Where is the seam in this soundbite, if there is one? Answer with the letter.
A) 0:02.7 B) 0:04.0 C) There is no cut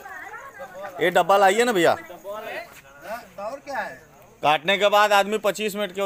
A